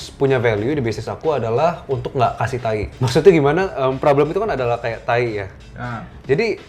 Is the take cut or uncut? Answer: cut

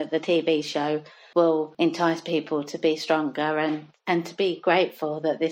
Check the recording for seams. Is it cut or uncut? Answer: cut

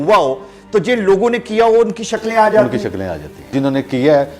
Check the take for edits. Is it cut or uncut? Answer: cut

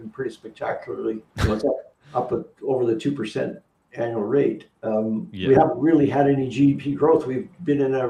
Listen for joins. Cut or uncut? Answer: uncut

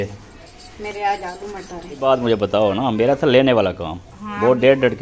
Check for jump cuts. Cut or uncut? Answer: cut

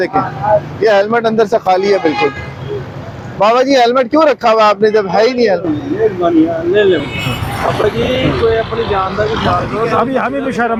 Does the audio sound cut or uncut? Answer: uncut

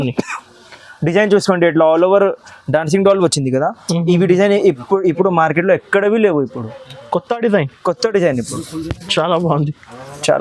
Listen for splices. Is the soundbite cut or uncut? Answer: uncut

